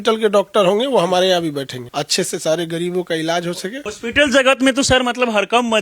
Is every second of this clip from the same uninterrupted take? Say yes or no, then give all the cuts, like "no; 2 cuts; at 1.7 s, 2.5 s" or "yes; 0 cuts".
no; 2 cuts; at 1.8 s, 3.9 s